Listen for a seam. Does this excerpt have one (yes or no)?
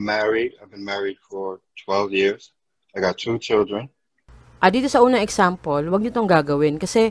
no